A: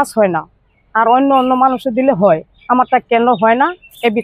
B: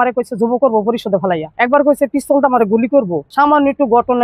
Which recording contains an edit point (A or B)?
B